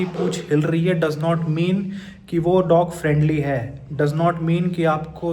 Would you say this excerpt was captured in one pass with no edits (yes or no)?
yes